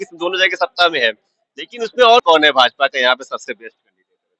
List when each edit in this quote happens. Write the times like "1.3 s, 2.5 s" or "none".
2.2 s